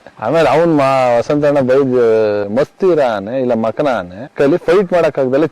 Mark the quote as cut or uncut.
cut